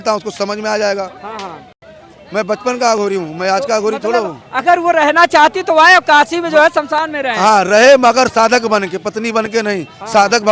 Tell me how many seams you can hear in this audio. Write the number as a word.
zero